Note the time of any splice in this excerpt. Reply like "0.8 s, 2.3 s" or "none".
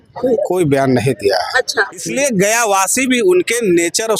2.0 s